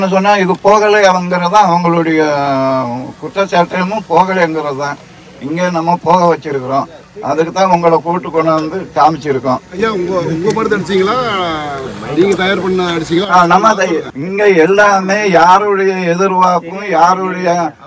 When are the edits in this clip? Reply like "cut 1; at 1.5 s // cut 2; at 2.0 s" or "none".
none